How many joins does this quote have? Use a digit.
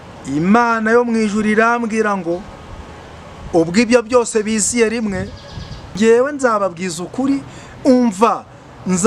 1